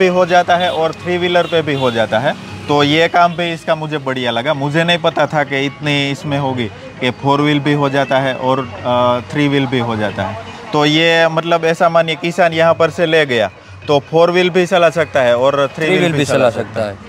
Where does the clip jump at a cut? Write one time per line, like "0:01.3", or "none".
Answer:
none